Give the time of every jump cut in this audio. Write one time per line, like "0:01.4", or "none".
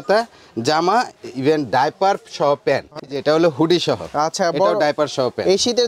0:03.1

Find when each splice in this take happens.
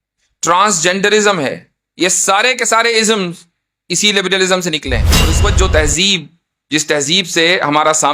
0:05.3

